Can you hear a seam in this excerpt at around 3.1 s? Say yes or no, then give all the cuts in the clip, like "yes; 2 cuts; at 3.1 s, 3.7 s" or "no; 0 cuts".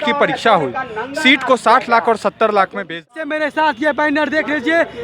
yes; 1 cut; at 3.1 s